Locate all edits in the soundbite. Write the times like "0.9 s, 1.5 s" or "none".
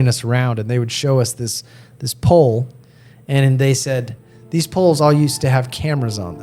none